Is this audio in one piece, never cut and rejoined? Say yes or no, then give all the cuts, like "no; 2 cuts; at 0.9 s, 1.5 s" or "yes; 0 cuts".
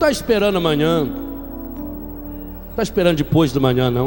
yes; 0 cuts